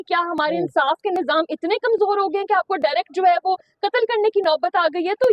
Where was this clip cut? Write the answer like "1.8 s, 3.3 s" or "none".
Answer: none